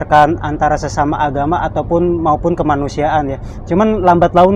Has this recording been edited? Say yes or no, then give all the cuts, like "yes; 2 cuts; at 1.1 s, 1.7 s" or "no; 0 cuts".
no; 0 cuts